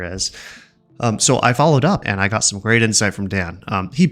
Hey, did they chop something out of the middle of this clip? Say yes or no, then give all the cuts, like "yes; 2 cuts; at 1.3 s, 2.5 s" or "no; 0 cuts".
yes; 1 cut; at 2.0 s